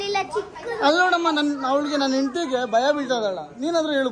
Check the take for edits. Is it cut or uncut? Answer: uncut